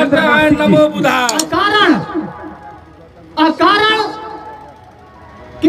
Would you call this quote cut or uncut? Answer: cut